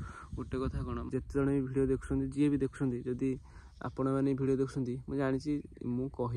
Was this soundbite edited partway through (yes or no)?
yes